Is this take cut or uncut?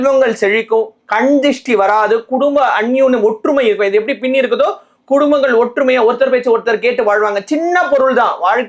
uncut